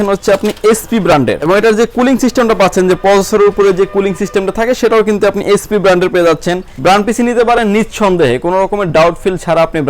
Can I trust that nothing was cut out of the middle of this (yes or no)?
no